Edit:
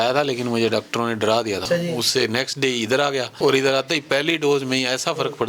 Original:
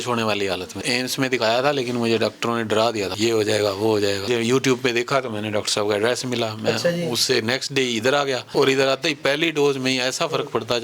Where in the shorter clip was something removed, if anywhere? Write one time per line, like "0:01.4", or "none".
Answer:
0:01.6

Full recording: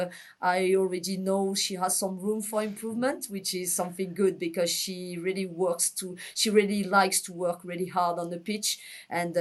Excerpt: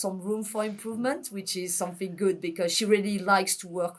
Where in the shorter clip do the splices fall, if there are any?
0:02.8

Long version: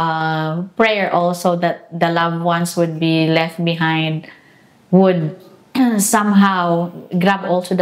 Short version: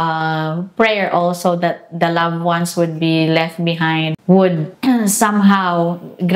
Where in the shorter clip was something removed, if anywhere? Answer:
0:04.1
0:04.7

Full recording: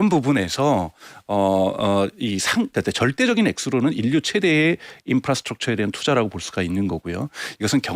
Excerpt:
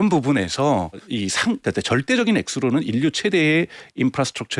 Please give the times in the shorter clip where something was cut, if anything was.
0:01.1

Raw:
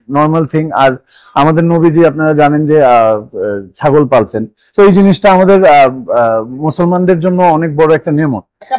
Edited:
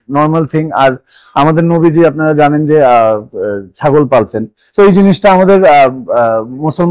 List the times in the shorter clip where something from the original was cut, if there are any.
none

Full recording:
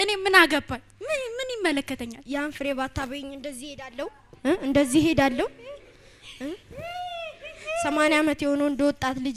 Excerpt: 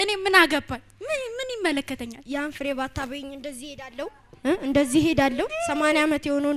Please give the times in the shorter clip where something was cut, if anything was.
0:05.5

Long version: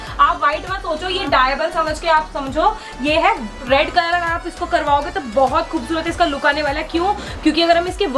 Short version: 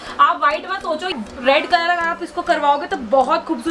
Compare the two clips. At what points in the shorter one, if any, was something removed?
0:01.2

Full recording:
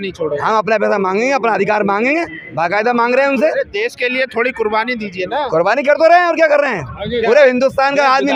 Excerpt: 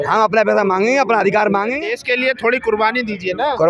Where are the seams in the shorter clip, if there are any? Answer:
0:01.9

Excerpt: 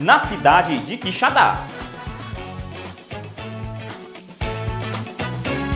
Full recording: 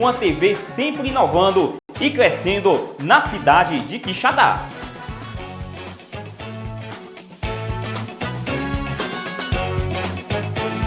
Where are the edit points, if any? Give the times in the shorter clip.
none

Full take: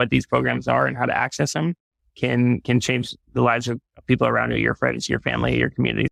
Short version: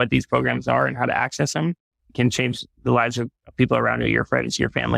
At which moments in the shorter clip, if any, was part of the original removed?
0:02.1

